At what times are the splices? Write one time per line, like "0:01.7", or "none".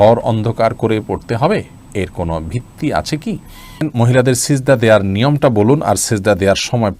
0:03.9